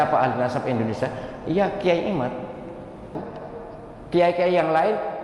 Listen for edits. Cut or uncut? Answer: cut